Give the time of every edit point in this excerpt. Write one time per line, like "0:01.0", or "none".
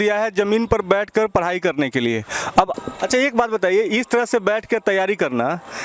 0:02.8